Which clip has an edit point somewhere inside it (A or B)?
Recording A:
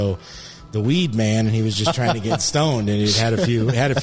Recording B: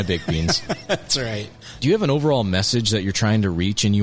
B